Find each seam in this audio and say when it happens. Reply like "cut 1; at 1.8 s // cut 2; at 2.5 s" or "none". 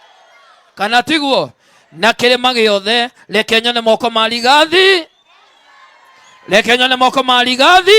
cut 1; at 3.0 s